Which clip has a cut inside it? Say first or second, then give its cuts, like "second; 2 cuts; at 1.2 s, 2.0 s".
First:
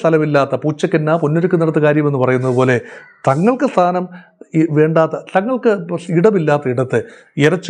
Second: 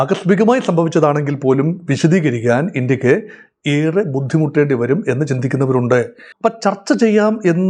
second; 1 cut; at 6.2 s